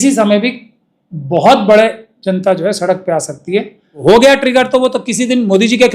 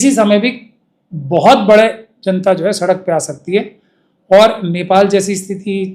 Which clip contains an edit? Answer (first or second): first